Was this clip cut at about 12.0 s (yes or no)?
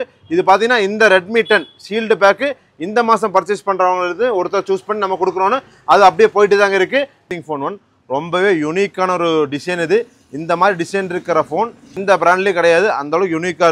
yes